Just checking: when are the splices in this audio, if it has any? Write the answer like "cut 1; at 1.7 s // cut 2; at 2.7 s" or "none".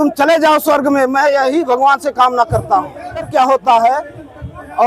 cut 1; at 3.3 s